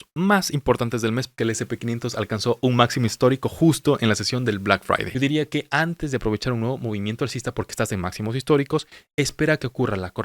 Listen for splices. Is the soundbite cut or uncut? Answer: cut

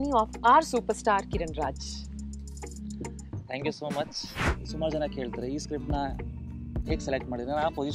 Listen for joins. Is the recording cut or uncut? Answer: cut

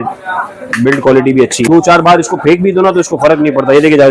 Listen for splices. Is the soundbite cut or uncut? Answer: cut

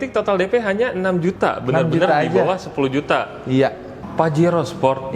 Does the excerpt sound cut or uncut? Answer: cut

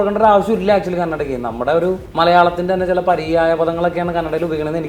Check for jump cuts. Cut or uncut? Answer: cut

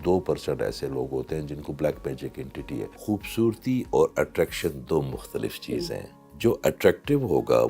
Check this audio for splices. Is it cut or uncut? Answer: cut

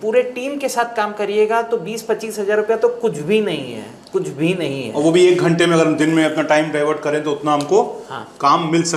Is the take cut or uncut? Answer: uncut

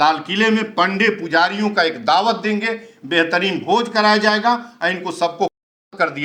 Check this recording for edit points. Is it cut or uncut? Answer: uncut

